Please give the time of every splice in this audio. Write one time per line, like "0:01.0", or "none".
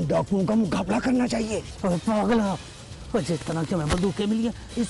none